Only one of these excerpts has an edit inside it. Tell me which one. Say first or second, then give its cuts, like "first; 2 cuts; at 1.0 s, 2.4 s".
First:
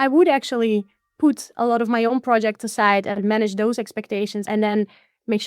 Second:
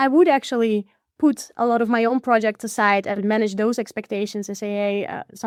first; 1 cut; at 4.5 s